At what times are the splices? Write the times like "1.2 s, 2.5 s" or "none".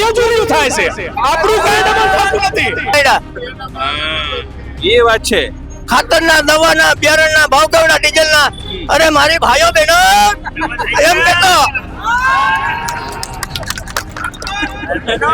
2.9 s